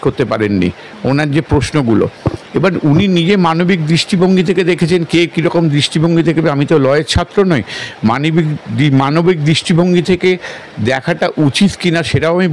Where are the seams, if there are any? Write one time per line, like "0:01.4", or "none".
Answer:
none